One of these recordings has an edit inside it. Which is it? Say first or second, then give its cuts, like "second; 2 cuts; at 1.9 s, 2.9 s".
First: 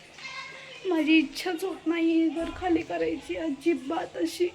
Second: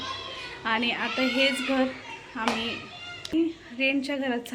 second; 1 cut; at 3.3 s